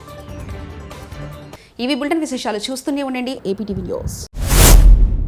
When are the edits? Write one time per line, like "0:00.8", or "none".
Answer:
none

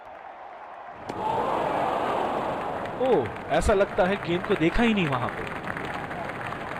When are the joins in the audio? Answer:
0:01.0

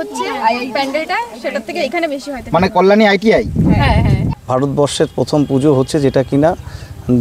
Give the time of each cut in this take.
0:04.3

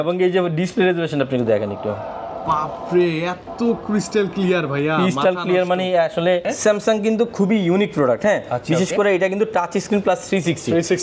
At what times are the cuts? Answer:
0:06.5

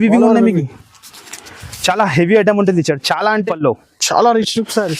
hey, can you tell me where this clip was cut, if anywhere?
0:03.5

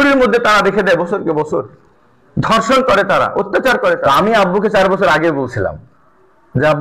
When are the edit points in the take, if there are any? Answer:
0:04.0

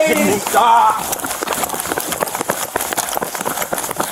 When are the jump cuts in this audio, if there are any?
none

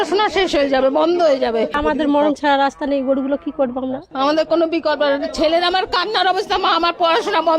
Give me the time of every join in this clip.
0:01.8
0:04.1

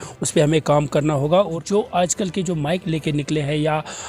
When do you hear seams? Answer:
0:01.6

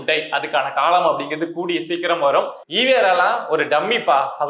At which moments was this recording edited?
0:02.6

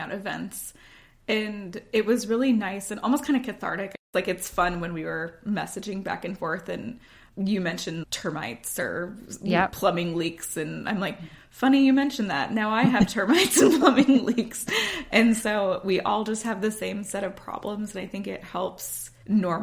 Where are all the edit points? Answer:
0:04.0
0:07.2
0:08.1

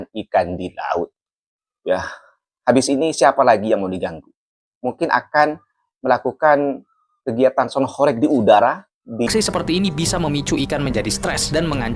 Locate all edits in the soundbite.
0:09.3

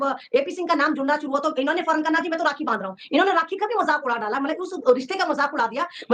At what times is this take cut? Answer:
none

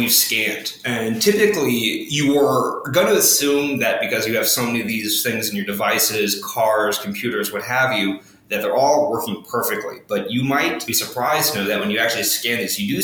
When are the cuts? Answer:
none

